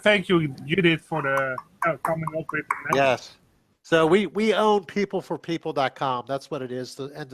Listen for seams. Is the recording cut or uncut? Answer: uncut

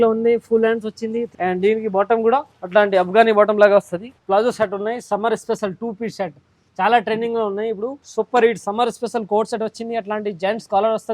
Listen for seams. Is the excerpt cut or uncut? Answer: cut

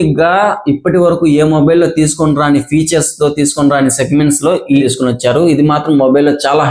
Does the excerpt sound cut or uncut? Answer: cut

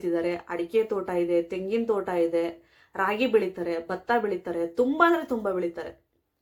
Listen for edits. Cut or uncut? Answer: uncut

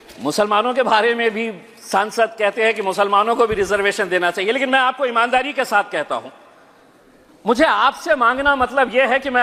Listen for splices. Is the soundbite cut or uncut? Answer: uncut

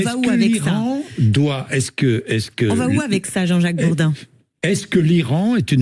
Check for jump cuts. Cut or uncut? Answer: uncut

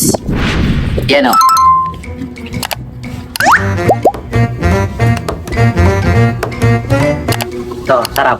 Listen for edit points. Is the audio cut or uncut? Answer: cut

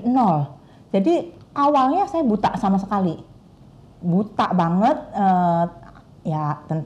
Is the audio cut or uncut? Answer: uncut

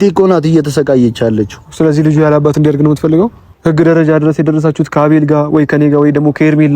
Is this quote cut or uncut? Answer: cut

